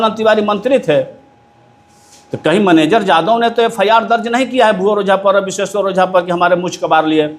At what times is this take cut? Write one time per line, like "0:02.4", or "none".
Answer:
none